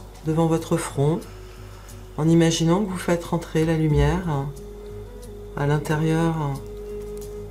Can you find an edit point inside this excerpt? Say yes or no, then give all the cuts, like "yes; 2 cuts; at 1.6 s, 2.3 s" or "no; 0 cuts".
no; 0 cuts